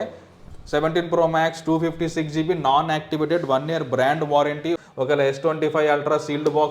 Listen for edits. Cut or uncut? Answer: cut